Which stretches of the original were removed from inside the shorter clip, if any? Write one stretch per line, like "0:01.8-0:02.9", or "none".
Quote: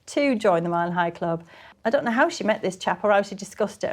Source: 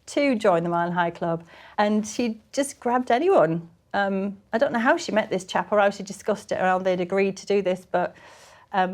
0:01.7-0:04.3